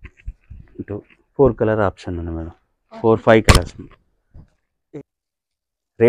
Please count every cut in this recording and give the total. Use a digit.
1